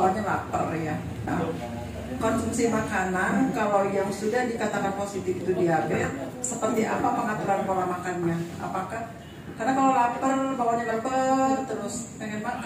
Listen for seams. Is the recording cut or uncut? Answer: cut